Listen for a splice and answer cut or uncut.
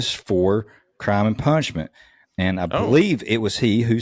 uncut